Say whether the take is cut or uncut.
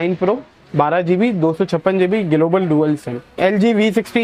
cut